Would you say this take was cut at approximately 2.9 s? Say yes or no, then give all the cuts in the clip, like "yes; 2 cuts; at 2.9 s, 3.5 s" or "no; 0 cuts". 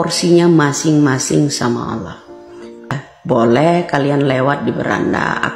yes; 1 cut; at 2.9 s